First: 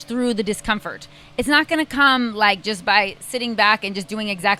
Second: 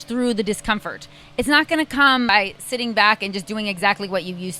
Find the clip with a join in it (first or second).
second